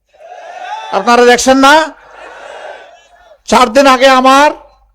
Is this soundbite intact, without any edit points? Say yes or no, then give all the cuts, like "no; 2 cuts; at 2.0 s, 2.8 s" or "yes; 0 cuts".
yes; 0 cuts